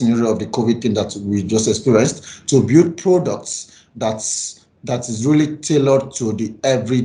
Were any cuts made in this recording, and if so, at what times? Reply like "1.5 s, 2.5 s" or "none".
none